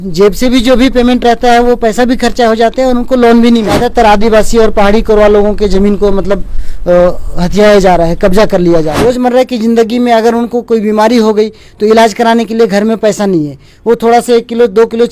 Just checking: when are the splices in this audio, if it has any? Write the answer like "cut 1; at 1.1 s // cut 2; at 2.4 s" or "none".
cut 1; at 3.8 s // cut 2; at 9.0 s